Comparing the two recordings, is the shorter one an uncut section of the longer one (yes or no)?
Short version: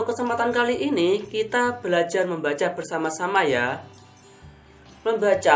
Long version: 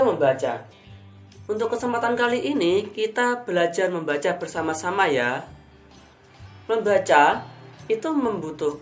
yes